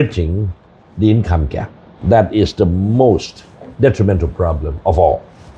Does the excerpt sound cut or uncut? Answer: cut